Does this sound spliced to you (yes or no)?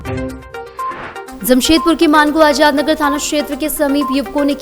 yes